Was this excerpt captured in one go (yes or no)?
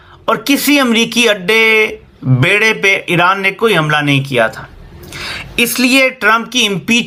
yes